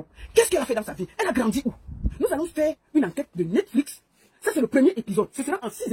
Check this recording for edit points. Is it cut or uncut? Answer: uncut